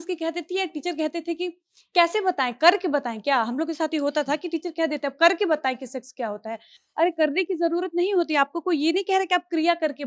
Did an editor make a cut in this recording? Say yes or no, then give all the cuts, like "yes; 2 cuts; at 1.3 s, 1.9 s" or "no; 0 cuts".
no; 0 cuts